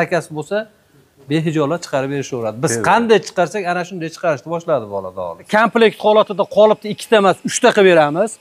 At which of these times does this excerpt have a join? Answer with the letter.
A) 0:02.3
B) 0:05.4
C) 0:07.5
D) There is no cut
B